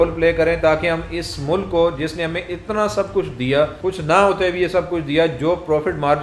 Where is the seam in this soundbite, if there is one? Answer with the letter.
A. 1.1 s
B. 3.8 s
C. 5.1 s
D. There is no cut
B